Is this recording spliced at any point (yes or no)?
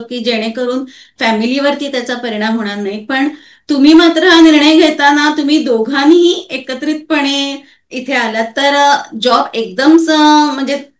no